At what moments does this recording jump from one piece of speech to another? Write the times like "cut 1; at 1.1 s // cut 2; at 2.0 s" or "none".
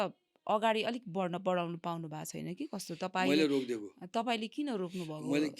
none